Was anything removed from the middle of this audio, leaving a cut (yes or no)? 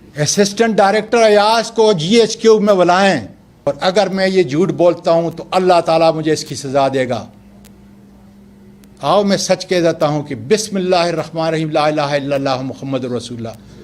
yes